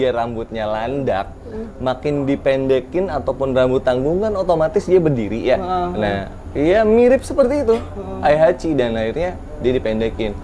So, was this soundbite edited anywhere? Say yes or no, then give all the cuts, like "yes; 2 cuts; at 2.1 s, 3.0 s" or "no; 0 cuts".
no; 0 cuts